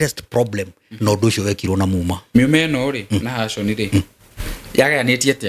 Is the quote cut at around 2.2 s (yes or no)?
yes